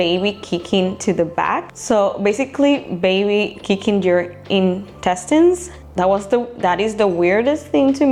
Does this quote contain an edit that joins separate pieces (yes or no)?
no